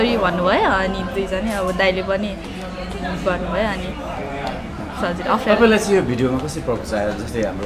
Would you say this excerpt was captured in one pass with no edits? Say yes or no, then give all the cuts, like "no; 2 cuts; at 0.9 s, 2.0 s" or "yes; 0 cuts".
yes; 0 cuts